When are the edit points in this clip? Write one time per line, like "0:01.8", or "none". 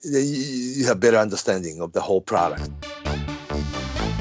0:02.7